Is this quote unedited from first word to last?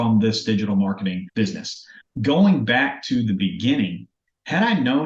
no; 1 cut; at 1.4 s

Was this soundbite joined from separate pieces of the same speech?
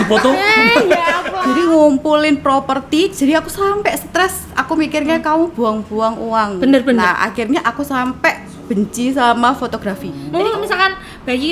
yes; 2 cuts; at 1.3 s, 10.2 s

